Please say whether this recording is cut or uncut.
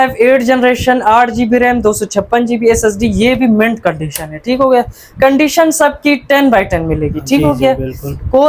uncut